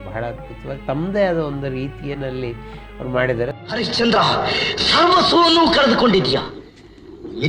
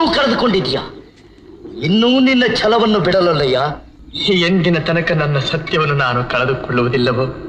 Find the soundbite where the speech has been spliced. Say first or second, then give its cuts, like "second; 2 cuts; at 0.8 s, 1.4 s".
first; 1 cut; at 3.5 s